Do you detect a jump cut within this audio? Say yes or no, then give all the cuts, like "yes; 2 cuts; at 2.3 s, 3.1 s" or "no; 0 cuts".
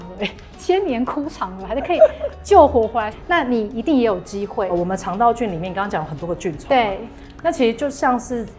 yes; 1 cut; at 4.7 s